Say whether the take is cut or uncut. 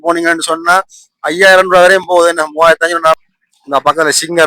cut